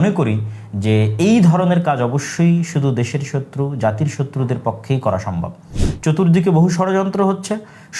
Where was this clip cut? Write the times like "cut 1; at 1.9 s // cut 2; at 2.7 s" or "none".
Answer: cut 1; at 5.8 s